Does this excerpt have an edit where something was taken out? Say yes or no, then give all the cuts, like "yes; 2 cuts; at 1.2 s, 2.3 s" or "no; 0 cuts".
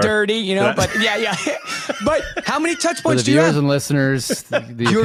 no; 0 cuts